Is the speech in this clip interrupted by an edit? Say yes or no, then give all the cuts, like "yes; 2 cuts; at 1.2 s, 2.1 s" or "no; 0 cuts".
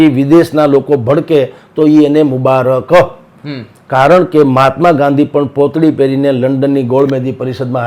no; 0 cuts